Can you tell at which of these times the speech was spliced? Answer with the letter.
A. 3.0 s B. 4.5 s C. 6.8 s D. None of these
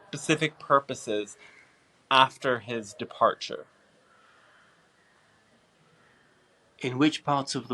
C